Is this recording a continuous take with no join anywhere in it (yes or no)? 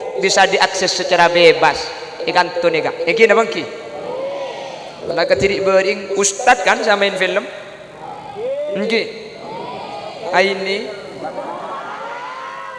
yes